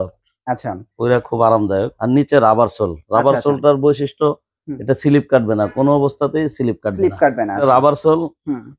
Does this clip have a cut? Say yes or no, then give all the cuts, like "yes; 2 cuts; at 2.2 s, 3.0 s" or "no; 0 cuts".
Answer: yes; 2 cuts; at 1.9 s, 7.6 s